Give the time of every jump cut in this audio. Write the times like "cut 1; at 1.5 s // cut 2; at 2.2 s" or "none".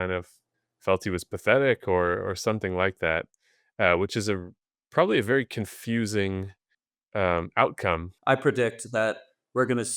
cut 1; at 8.1 s